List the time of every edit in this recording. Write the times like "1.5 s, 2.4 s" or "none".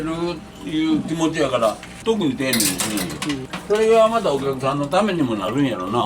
2.0 s, 3.5 s